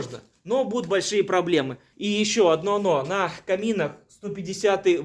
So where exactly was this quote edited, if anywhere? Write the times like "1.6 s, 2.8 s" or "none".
1.8 s